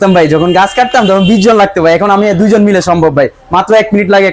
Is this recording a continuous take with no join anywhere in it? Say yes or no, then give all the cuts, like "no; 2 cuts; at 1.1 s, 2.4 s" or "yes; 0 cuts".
yes; 0 cuts